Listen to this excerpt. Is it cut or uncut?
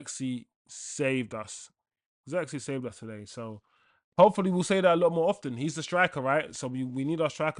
uncut